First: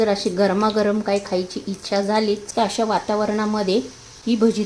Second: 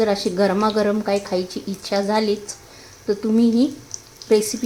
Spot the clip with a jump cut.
first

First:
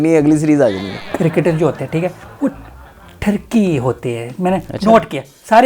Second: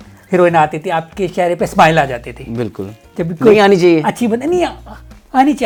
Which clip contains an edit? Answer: first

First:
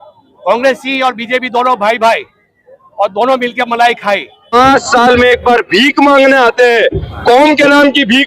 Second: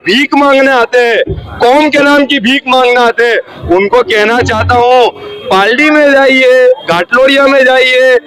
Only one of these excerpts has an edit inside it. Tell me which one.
first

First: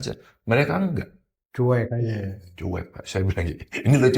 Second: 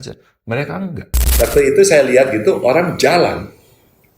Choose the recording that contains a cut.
second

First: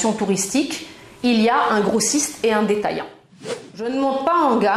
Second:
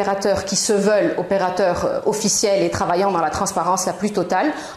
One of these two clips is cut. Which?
first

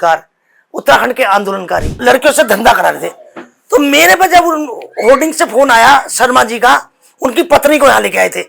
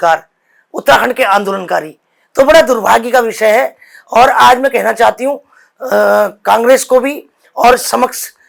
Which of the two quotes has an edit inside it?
first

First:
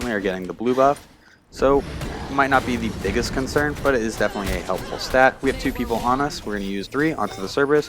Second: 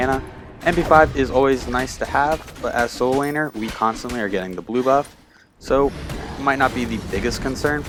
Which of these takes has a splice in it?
first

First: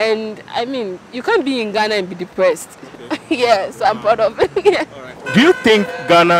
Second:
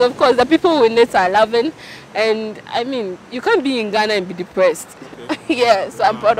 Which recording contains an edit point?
first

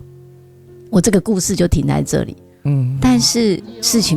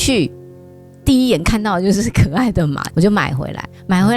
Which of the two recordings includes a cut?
second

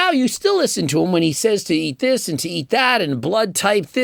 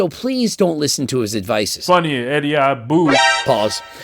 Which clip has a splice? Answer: second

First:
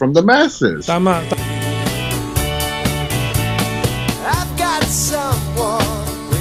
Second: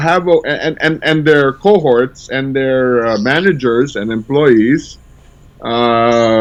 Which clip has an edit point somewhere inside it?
first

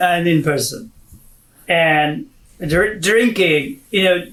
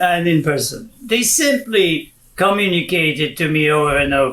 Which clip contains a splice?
second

